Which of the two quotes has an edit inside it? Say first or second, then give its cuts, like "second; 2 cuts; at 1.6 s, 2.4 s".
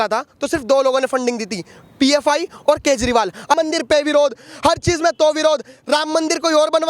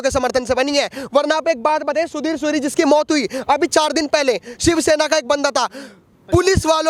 first; 1 cut; at 3.6 s